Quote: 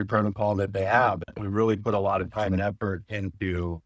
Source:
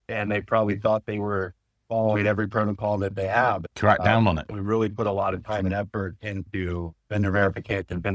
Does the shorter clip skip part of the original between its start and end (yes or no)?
yes